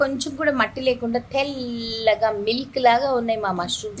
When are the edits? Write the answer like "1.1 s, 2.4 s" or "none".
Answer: none